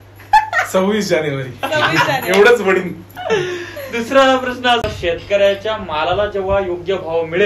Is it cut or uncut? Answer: cut